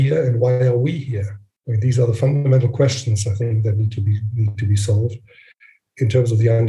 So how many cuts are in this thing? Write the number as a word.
zero